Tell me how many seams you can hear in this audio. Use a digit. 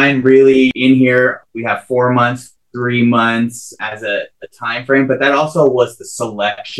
3